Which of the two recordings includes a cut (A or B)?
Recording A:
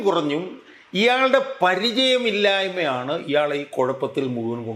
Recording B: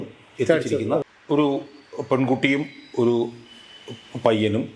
B